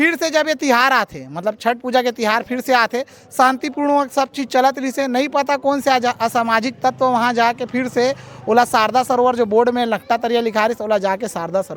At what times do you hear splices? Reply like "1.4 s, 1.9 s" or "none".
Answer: none